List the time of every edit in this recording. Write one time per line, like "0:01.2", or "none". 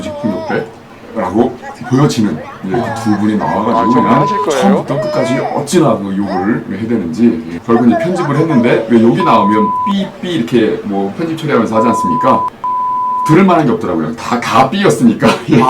none